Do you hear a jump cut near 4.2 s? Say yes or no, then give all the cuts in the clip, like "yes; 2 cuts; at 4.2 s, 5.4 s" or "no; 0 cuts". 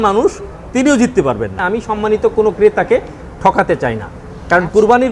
no; 1 cut; at 1.6 s